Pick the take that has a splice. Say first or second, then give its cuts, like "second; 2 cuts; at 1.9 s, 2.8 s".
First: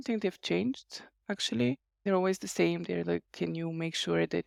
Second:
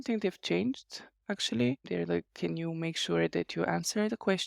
second; 1 cut; at 1.9 s